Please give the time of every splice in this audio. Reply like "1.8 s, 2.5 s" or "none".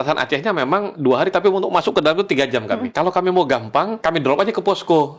0.9 s, 2.9 s, 3.9 s